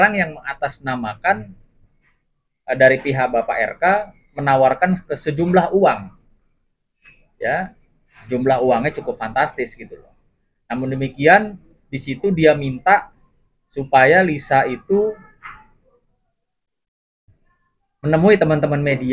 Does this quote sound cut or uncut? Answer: uncut